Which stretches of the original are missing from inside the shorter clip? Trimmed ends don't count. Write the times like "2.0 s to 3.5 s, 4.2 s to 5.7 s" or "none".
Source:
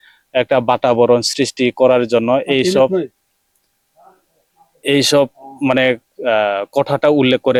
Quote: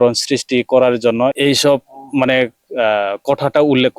2.4 s to 4.8 s